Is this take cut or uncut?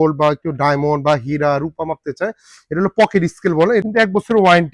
cut